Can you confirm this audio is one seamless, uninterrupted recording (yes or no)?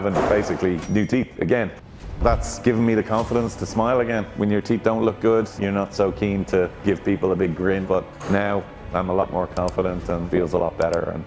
no